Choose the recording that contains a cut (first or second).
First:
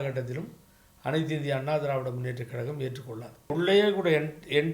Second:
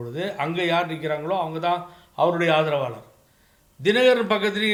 first